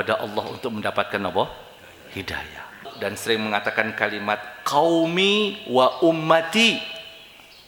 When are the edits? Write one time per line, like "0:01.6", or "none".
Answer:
0:02.9